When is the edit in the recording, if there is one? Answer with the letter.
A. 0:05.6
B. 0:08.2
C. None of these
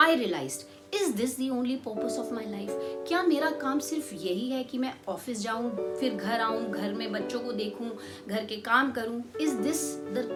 C